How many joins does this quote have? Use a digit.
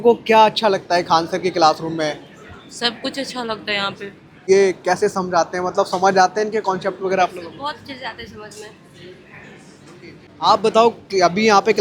2